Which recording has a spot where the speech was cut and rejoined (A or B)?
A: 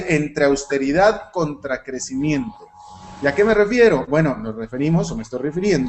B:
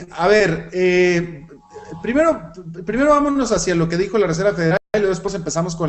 A